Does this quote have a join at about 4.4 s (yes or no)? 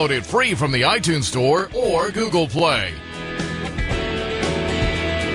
no